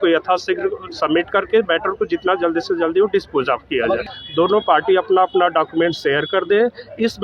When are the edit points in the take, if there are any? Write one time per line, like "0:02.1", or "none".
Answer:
0:04.1